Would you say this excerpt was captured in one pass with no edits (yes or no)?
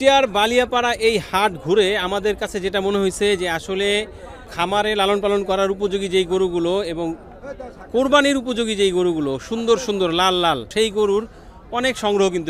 no